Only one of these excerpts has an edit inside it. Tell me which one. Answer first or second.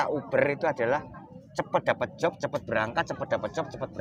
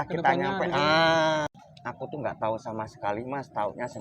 second